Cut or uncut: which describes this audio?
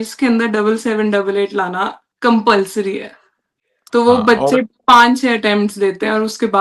uncut